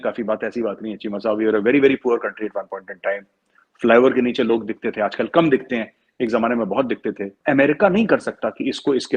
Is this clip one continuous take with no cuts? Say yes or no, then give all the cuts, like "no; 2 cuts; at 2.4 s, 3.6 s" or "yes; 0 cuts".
no; 1 cut; at 7.4 s